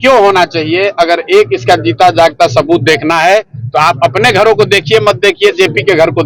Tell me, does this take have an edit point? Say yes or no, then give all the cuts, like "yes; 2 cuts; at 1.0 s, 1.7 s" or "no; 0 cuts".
no; 0 cuts